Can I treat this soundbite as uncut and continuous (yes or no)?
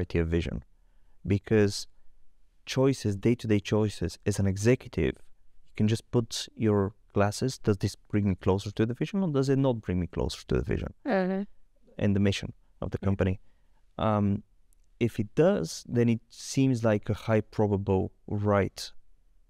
yes